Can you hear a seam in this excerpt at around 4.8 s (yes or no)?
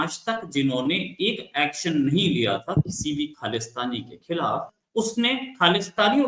yes